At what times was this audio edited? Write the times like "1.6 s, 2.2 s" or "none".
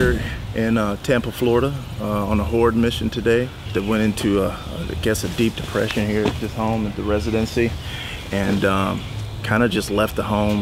none